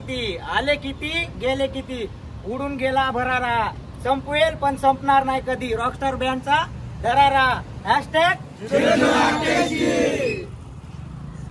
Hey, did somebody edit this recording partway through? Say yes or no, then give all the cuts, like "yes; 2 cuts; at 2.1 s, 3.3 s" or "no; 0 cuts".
no; 0 cuts